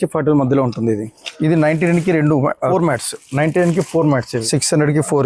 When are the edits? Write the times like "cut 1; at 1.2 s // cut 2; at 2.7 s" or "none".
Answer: cut 1; at 1.1 s // cut 2; at 2.7 s // cut 3; at 4.4 s